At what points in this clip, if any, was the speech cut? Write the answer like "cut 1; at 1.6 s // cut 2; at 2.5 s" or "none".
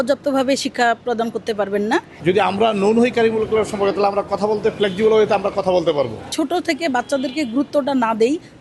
cut 1; at 2.1 s // cut 2; at 6.3 s